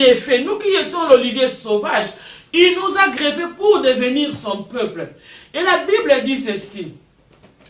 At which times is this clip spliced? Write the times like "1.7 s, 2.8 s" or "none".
none